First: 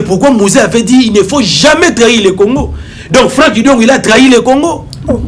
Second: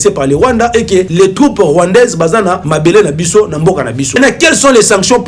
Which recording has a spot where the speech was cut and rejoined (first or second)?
second